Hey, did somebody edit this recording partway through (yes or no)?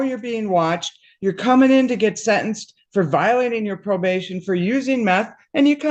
no